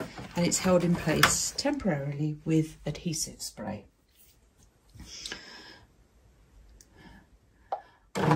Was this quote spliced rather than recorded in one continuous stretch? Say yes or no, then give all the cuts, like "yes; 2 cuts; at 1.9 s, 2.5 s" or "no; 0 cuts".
no; 0 cuts